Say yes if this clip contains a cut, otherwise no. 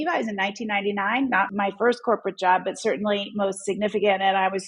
yes